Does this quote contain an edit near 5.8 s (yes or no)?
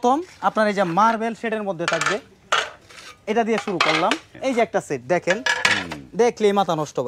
no